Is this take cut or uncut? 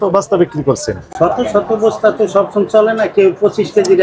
uncut